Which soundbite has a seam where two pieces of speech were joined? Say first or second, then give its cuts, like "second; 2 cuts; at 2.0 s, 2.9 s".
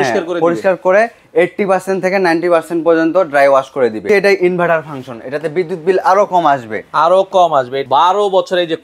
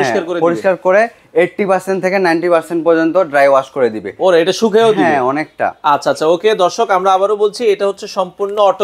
first; 2 cuts; at 4.0 s, 7.8 s